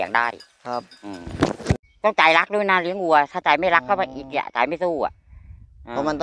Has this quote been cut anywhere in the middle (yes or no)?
yes